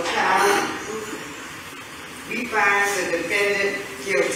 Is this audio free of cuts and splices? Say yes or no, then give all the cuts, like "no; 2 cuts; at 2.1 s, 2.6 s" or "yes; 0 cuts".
no; 1 cut; at 2.1 s